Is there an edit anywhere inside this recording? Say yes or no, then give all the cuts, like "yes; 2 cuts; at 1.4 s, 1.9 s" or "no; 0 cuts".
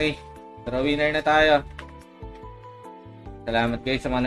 no; 0 cuts